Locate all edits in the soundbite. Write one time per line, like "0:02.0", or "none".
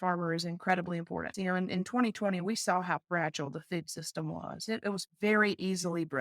0:01.3

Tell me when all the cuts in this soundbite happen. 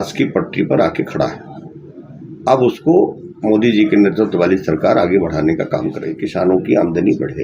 0:06.2

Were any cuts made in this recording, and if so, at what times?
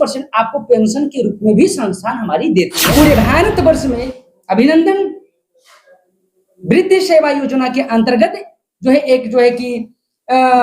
0:02.8

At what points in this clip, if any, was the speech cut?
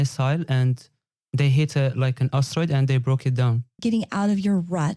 0:03.8

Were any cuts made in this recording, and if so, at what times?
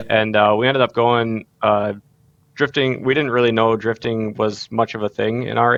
none

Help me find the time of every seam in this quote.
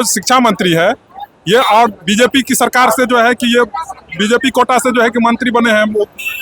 none

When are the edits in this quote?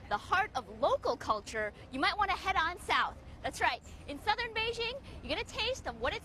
0:01.8

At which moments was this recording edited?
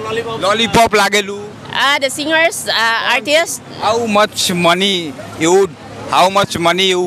0:03.6

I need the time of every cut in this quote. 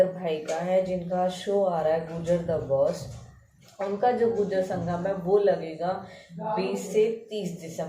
none

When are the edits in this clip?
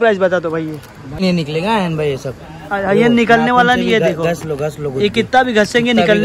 0:01.2

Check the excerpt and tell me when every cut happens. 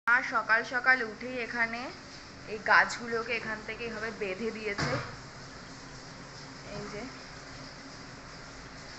none

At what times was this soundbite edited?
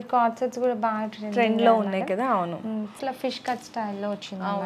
0:03.0

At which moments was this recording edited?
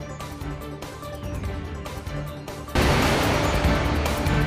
0:01.8

